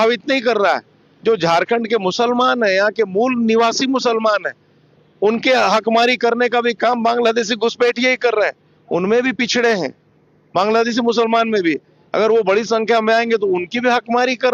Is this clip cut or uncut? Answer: uncut